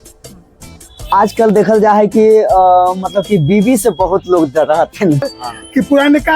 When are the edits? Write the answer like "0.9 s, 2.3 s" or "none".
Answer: 5.2 s